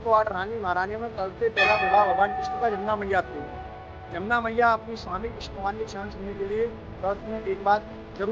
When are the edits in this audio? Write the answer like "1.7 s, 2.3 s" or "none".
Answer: none